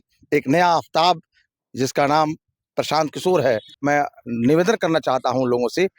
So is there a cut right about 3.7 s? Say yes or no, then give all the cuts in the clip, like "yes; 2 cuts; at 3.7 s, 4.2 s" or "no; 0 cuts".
yes; 1 cut; at 3.7 s